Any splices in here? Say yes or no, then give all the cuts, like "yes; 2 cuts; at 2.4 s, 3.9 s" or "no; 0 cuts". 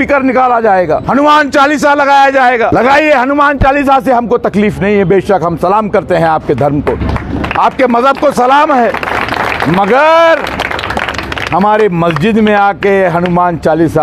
yes; 2 cuts; at 1.0 s, 2.7 s